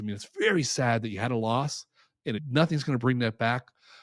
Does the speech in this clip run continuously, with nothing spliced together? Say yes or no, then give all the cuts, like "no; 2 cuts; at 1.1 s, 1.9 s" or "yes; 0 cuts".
no; 1 cut; at 2.4 s